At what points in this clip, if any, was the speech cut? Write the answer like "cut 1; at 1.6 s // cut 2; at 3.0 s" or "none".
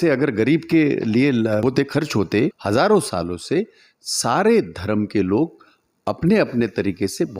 cut 1; at 1.6 s // cut 2; at 2.6 s

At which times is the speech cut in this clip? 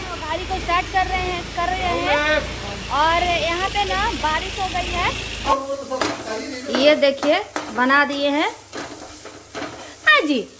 cut 1; at 5.5 s

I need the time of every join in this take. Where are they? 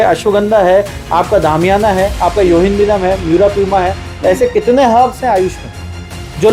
none

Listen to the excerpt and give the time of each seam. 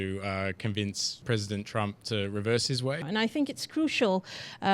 cut 1; at 1.1 s // cut 2; at 3.0 s

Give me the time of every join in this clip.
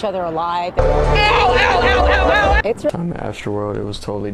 cut 1; at 2.9 s

